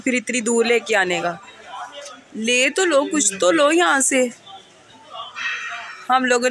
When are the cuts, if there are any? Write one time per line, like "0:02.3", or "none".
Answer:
none